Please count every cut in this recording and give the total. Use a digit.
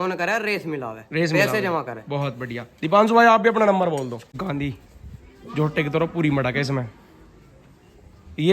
1